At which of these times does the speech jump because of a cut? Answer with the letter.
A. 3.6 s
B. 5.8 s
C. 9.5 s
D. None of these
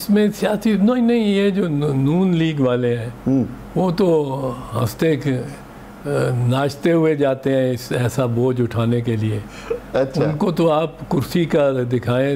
D